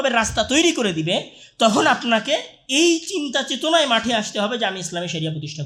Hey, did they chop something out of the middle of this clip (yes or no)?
no